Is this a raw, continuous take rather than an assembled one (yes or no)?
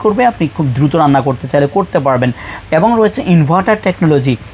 yes